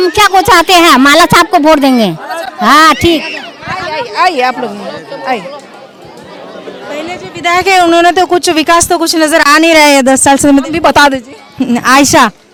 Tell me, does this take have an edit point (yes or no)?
no